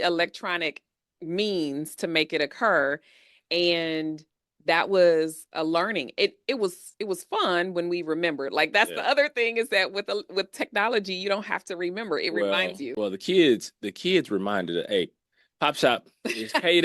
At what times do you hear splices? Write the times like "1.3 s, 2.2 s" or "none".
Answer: 12.9 s